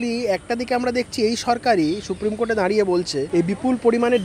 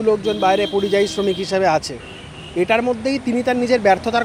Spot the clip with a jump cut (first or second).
first